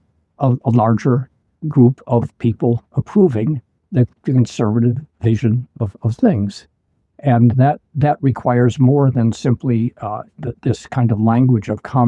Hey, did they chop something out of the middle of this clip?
yes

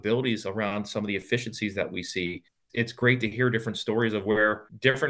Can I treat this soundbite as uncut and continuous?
no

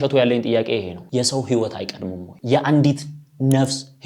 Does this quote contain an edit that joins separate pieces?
yes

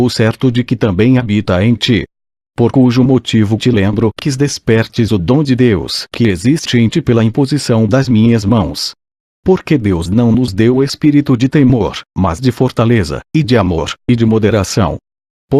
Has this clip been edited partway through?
no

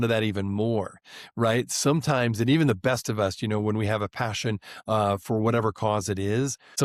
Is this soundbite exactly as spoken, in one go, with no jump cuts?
yes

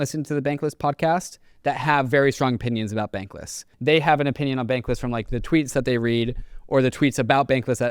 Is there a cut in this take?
yes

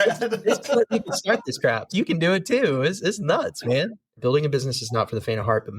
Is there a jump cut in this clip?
yes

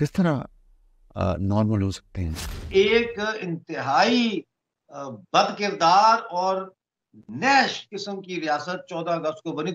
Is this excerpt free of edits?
no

